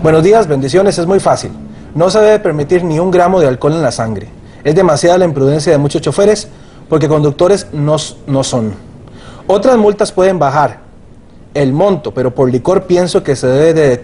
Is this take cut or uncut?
uncut